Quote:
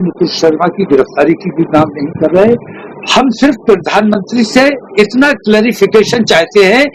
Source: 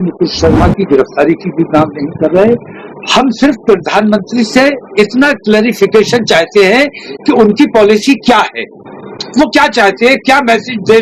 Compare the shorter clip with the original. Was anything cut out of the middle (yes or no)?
no